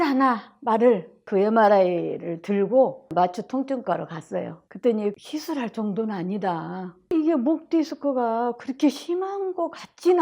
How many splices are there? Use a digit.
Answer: 4